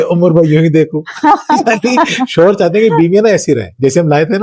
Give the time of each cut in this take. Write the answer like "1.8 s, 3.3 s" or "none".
none